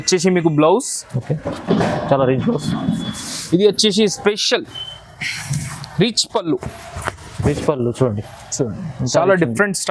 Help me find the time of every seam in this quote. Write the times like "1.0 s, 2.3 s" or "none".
none